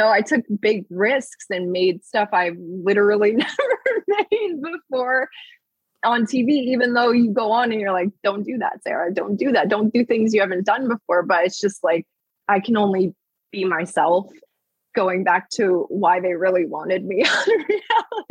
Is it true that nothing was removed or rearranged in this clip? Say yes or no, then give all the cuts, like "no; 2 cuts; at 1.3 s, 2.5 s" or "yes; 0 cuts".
no; 1 cut; at 12.4 s